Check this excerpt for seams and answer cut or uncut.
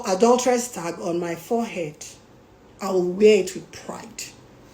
uncut